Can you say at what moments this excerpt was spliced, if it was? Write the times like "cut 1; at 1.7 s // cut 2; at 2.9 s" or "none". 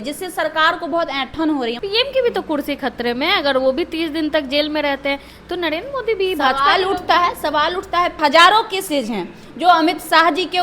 cut 1; at 1.8 s // cut 2; at 8.2 s